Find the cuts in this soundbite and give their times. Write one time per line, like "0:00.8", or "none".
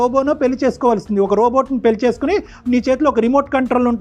none